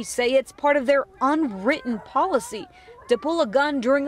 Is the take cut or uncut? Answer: uncut